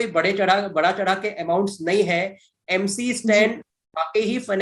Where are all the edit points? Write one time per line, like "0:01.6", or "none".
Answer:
none

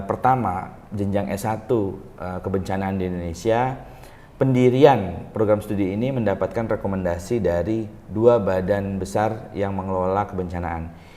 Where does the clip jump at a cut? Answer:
none

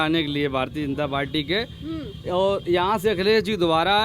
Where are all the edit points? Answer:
none

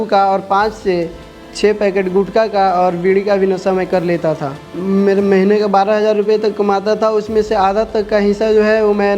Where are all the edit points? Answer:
0:04.6

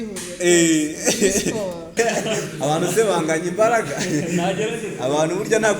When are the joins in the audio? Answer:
0:01.9

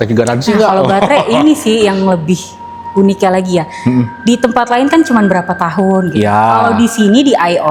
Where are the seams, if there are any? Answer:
none

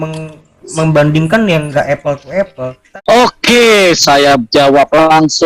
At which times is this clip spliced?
0:02.8

